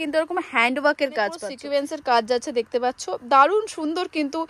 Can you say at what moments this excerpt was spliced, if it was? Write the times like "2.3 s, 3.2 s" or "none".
1.5 s